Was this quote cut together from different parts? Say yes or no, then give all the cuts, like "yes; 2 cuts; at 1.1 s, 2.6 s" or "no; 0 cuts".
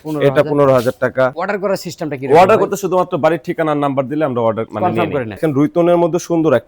yes; 2 cuts; at 1.4 s, 5.4 s